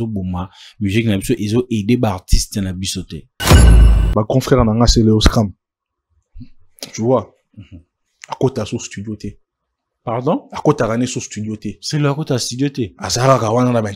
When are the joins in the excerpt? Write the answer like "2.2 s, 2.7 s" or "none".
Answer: 3.7 s